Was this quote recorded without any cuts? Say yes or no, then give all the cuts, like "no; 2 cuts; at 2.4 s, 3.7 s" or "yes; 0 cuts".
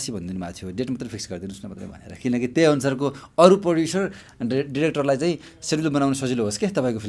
yes; 0 cuts